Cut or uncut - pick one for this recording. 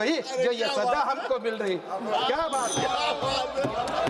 uncut